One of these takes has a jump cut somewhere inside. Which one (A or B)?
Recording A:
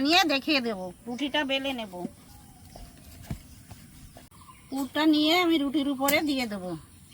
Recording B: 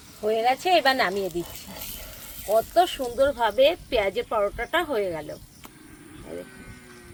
A